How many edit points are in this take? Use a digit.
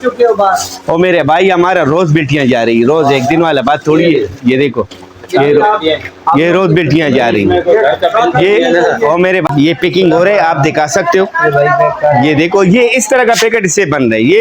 1